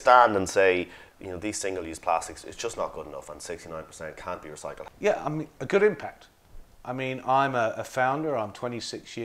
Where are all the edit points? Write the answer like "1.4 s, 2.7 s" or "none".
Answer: 4.8 s